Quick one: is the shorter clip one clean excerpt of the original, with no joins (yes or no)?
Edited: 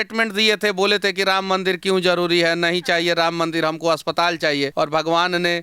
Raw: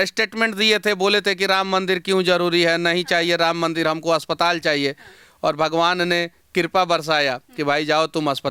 no